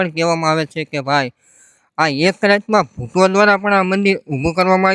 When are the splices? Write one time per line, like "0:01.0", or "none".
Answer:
none